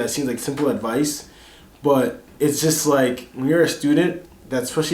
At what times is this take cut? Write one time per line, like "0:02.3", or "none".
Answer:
none

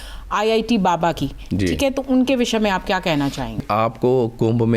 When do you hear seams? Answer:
0:03.6

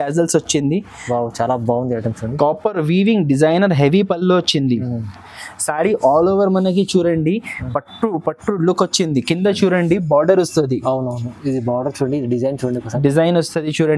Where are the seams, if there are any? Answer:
none

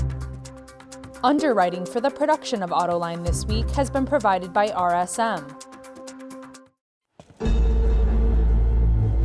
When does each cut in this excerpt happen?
0:01.2
0:05.4
0:06.5

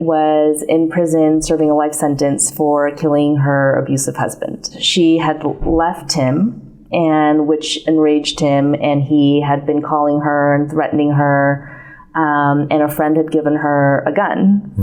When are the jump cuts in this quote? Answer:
0:04.8

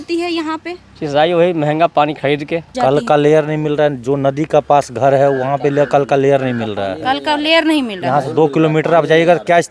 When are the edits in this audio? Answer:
0:02.7

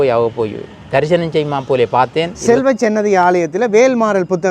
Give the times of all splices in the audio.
0:02.3

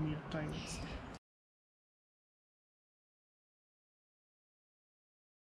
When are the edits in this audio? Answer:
none

